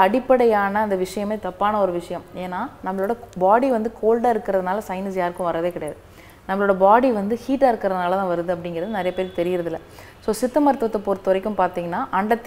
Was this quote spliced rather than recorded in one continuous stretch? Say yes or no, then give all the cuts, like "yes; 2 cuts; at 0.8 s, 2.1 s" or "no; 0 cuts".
no; 0 cuts